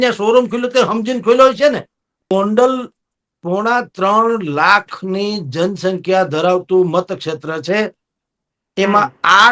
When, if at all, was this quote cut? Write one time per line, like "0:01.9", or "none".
0:02.3